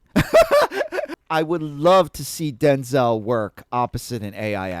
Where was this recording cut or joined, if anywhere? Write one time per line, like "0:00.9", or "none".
0:01.2